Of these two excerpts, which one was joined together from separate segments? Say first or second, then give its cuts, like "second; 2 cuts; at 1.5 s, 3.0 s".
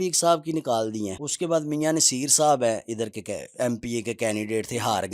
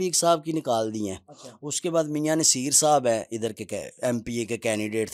first; 1 cut; at 1.2 s